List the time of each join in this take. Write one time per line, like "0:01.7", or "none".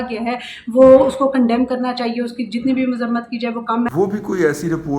0:03.9